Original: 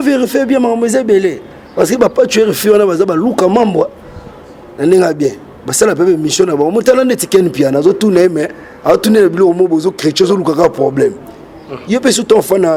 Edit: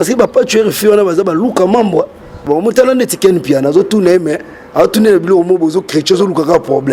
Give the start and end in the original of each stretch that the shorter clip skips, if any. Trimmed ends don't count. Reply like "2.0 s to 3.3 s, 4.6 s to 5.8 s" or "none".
4.3 s to 6.5 s